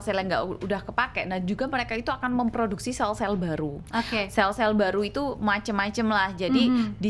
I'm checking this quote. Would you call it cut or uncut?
uncut